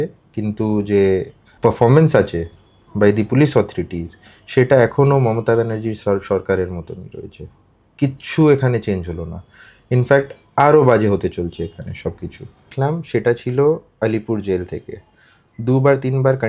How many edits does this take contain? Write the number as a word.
two